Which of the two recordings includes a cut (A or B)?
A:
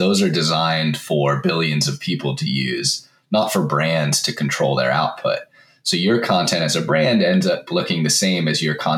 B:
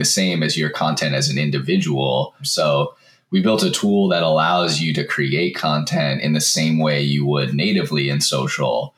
B